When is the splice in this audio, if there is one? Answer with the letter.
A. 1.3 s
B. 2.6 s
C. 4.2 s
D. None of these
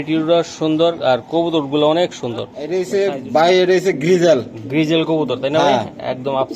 B